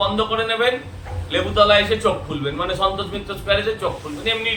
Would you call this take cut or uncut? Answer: uncut